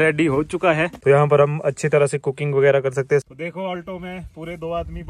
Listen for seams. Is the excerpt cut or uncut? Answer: cut